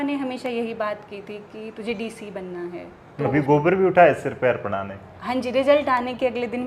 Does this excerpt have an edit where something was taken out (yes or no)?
yes